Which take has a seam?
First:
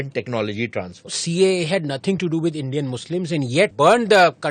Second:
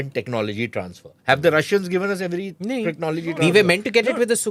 first; 2 cuts; at 1.2 s, 3.7 s

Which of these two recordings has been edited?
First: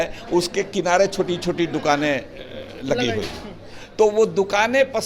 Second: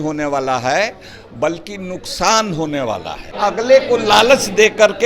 second; 1 cut; at 3.3 s

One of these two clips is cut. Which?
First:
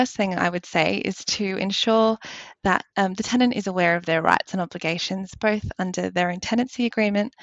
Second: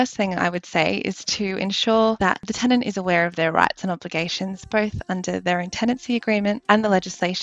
second; 2 cuts; at 2.5 s, 6.6 s

